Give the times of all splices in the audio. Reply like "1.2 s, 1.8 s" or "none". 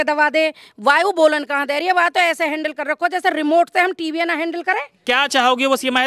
4.9 s